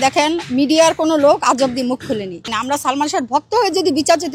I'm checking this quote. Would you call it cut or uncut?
cut